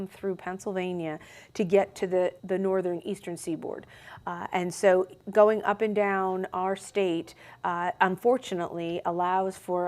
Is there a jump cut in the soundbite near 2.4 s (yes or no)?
yes